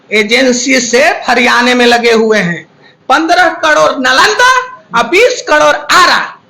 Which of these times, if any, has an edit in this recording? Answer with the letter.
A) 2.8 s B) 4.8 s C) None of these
A